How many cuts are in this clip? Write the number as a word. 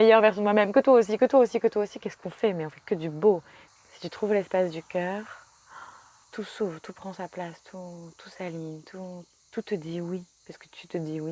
three